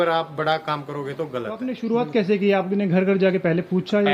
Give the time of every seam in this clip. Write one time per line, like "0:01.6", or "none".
0:01.7